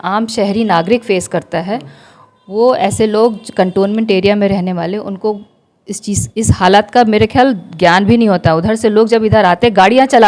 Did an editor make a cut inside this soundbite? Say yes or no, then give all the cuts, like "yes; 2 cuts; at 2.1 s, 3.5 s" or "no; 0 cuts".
no; 0 cuts